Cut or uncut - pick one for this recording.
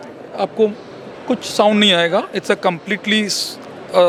uncut